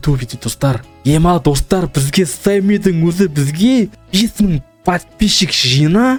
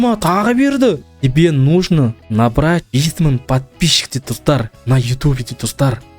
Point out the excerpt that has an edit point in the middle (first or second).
second